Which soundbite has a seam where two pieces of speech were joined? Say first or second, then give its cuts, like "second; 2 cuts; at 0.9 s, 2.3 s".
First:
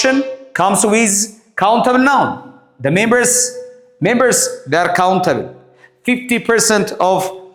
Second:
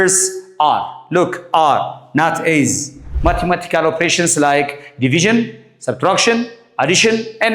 second; 1 cut; at 3.1 s